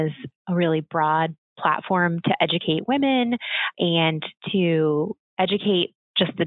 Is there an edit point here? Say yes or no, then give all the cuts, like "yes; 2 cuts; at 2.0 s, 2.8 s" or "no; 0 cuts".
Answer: yes; 1 cut; at 5.2 s